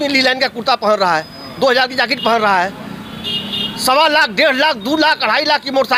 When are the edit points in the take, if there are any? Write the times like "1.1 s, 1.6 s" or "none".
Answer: none